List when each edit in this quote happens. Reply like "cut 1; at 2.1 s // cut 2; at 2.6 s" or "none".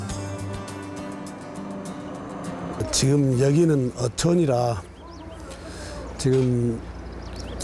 cut 1; at 6.6 s